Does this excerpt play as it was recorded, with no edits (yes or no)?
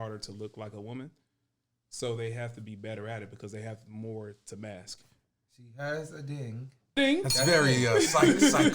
no